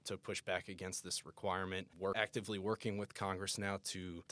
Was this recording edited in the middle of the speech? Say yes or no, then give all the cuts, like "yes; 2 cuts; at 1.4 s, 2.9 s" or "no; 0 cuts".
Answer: yes; 1 cut; at 2.0 s